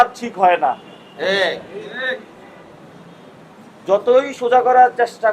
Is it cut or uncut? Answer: uncut